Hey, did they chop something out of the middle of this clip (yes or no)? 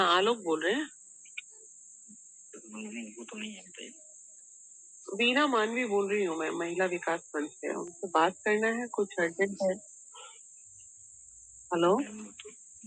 no